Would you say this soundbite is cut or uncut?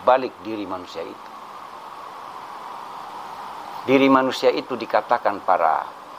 cut